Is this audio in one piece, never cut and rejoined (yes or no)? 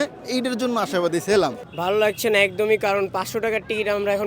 no